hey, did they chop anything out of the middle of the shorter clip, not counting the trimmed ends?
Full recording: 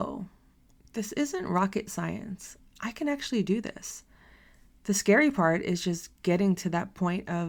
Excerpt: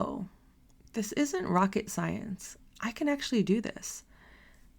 no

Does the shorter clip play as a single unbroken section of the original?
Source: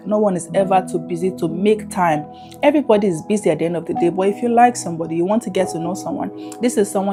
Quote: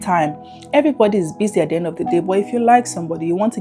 yes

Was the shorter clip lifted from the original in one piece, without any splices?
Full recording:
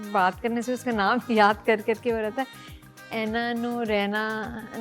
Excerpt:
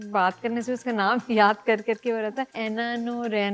no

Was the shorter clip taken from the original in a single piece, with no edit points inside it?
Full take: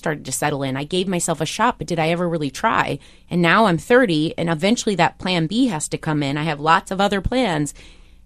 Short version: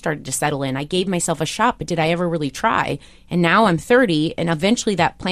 yes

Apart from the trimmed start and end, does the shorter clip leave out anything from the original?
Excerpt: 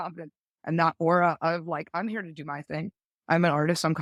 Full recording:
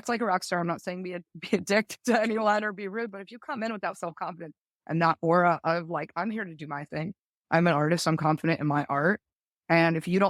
no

